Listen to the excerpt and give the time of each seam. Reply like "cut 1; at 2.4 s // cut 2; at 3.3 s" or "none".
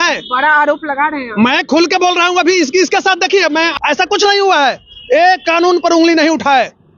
cut 1; at 3.7 s